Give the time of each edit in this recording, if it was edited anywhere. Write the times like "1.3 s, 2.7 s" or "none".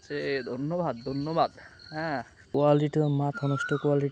2.5 s